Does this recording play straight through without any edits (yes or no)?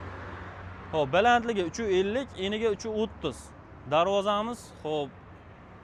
yes